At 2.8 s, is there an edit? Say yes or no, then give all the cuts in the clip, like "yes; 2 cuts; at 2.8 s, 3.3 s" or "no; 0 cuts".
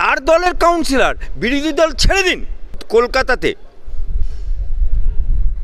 yes; 1 cut; at 2.8 s